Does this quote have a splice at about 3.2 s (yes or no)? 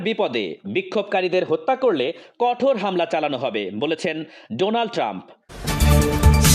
no